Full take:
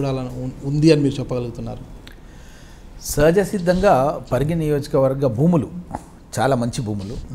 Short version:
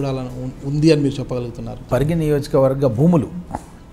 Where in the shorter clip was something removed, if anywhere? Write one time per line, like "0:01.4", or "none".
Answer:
0:01.8